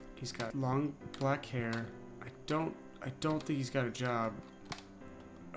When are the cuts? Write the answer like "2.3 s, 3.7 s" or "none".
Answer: none